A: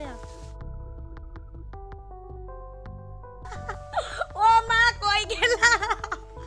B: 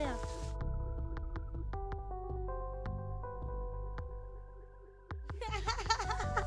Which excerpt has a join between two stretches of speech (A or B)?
A